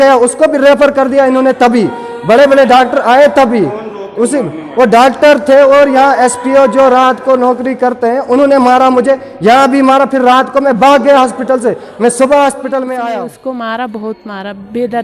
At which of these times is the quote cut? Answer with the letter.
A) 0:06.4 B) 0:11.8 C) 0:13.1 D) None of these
C